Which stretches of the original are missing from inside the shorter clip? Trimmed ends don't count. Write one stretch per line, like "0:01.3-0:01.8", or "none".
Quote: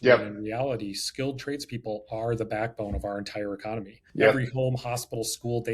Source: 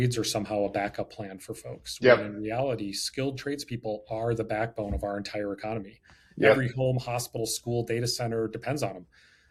0:06.0-0:06.2